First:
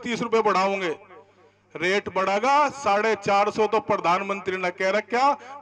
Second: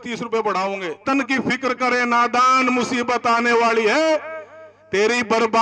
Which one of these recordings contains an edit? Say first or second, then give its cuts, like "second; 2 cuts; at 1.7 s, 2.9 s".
second; 1 cut; at 1.0 s